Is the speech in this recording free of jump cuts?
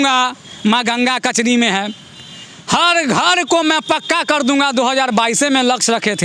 yes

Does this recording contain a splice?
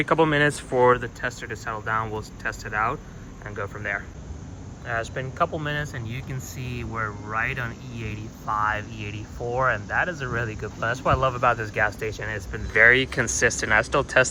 no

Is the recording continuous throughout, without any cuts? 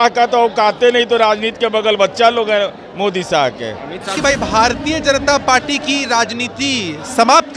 no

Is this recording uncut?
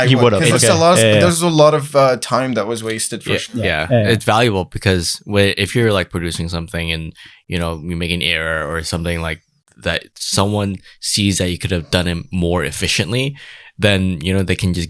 yes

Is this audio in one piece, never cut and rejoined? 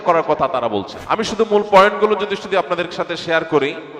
no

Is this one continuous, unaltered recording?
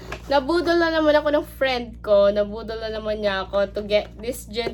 yes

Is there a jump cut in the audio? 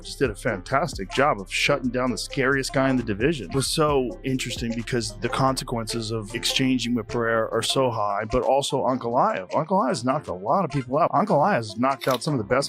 yes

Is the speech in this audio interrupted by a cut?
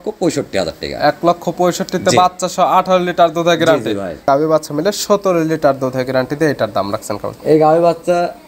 yes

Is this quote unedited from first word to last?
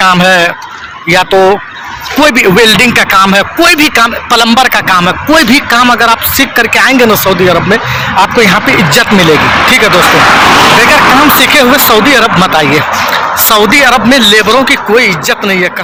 yes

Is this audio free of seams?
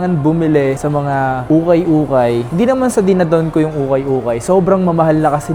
yes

